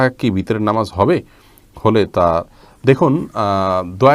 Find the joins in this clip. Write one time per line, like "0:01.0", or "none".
none